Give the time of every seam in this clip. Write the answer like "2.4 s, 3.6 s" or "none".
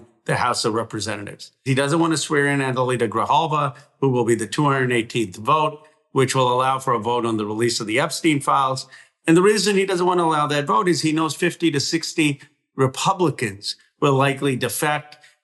1.7 s